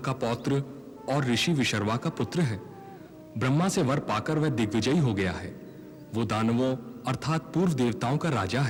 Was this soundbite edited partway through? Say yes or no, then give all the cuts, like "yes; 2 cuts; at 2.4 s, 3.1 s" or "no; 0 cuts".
no; 0 cuts